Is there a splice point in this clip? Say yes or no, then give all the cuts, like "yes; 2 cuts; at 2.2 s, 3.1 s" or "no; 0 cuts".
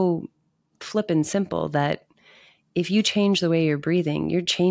no; 0 cuts